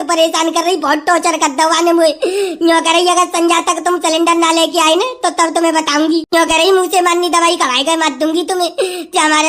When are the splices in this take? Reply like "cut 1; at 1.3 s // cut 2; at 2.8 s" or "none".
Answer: cut 1; at 6.3 s